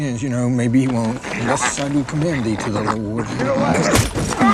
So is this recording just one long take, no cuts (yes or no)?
no